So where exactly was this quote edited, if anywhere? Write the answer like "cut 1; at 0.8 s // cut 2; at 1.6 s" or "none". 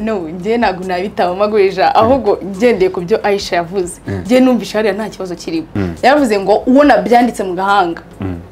cut 1; at 5.8 s